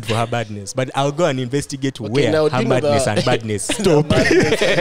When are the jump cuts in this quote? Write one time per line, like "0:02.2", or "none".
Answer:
0:03.7

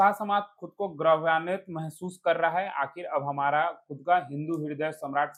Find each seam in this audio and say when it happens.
none

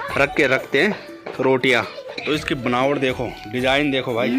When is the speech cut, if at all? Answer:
0:02.1

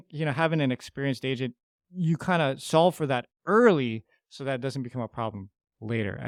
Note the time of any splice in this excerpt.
none

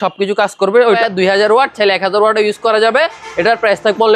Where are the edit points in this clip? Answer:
0:01.0

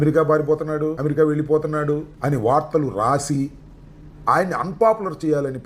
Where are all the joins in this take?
0:01.0
0:02.1

